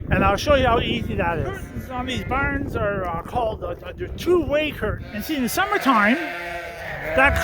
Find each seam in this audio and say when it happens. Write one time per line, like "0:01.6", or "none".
0:01.8
0:05.2